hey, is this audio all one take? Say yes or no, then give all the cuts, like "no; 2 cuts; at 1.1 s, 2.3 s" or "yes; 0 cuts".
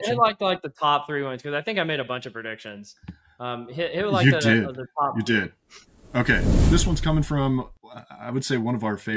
no; 1 cut; at 6.5 s